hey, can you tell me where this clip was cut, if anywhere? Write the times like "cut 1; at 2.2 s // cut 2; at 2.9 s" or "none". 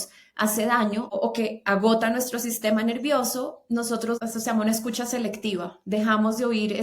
cut 1; at 1.1 s // cut 2; at 4.2 s